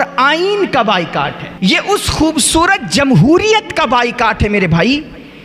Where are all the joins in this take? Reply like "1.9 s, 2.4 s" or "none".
1.4 s